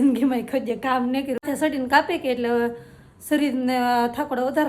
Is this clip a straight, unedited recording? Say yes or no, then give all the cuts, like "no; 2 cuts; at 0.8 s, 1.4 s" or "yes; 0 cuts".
no; 1 cut; at 1.4 s